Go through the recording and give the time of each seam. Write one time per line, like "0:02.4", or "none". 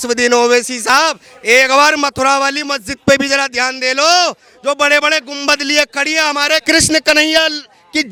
none